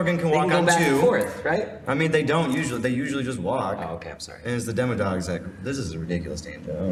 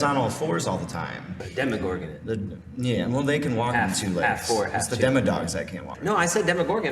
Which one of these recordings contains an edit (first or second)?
second